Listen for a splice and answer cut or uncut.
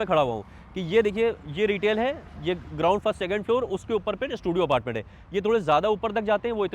uncut